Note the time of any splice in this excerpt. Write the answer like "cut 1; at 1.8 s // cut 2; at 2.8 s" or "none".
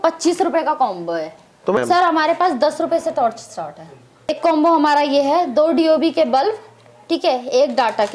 cut 1; at 1.8 s // cut 2; at 4.3 s

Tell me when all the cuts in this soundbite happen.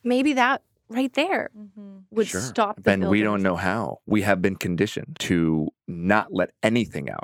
cut 1; at 3.9 s // cut 2; at 5.1 s // cut 3; at 5.8 s

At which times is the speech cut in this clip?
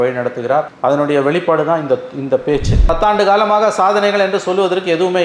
cut 1; at 2.8 s

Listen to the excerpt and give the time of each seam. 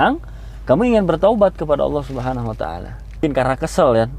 cut 1; at 3.2 s

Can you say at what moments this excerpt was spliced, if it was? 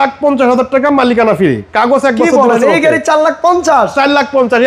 none

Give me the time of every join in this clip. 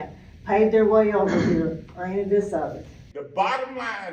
cut 1; at 2.9 s

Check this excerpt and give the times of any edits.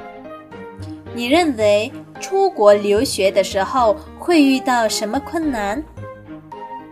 cut 1; at 1.1 s // cut 2; at 5.9 s

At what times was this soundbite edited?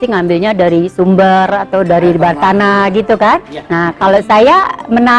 cut 1; at 3.6 s

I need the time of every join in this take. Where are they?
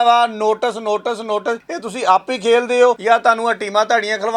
cut 1; at 1.7 s // cut 2; at 3.0 s

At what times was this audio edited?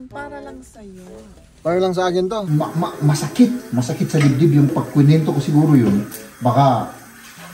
cut 1; at 2.5 s // cut 2; at 4.7 s

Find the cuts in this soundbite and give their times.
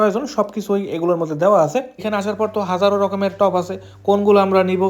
cut 1; at 2.0 s

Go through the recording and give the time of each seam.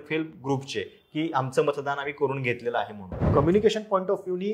cut 1; at 3.2 s

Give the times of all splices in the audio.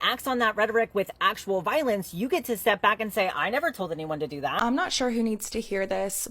cut 1; at 4.5 s

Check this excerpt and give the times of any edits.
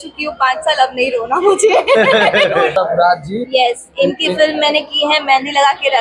cut 1; at 2.7 s

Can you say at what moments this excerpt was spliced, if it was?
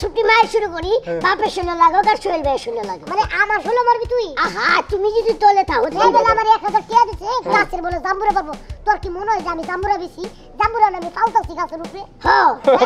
cut 1; at 5.9 s

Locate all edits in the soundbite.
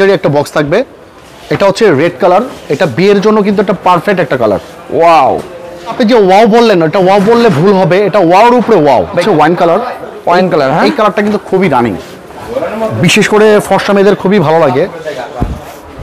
cut 1; at 5.9 s // cut 2; at 9.2 s

